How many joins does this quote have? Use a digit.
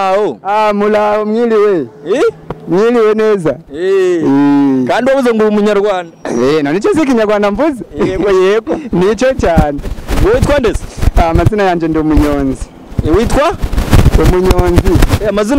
0